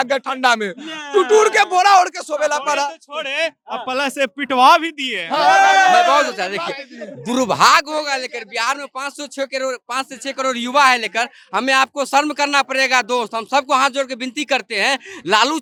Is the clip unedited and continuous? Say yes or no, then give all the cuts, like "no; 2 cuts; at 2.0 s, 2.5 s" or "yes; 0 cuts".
yes; 0 cuts